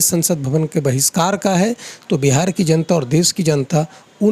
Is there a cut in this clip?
no; 0 cuts

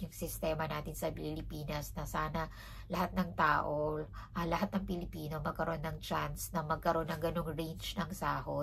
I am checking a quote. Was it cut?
no; 0 cuts

